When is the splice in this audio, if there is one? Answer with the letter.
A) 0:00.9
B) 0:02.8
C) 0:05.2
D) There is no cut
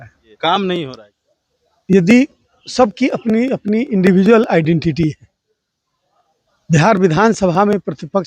A